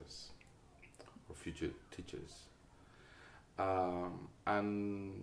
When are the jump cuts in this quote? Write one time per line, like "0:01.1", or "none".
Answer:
0:04.3